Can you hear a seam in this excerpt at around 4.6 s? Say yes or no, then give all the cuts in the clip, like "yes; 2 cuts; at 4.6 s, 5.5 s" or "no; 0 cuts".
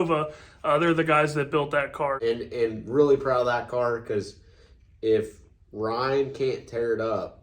no; 1 cut; at 2.2 s